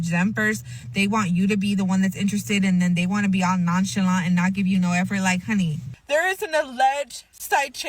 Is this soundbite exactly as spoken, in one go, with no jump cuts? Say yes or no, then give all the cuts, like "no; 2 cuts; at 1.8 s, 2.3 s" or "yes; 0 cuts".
no; 1 cut; at 5.9 s